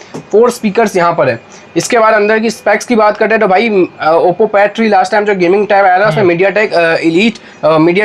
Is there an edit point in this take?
no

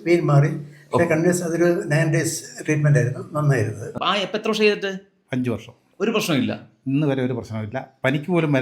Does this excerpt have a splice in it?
yes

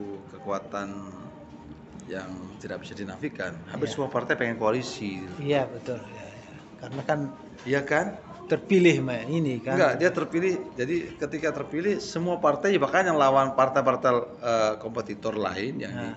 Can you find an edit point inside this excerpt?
no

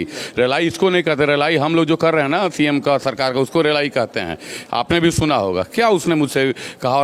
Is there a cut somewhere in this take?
no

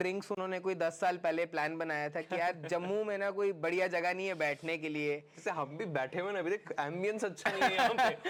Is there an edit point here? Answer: no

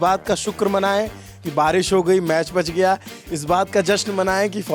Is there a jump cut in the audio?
no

